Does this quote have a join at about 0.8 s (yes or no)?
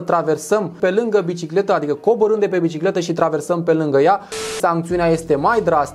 yes